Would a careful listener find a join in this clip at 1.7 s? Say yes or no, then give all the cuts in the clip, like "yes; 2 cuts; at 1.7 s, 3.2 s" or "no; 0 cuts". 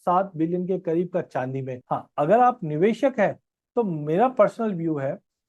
yes; 1 cut; at 1.7 s